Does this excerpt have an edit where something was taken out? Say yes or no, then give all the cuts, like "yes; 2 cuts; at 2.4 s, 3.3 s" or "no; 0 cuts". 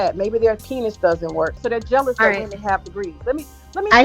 yes; 1 cut; at 1.6 s